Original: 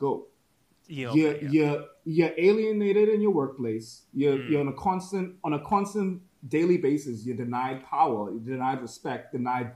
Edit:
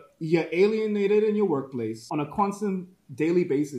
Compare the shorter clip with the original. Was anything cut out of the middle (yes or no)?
yes